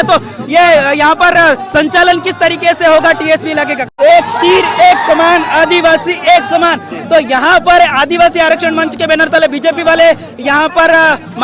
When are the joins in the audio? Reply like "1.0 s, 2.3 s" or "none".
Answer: 3.9 s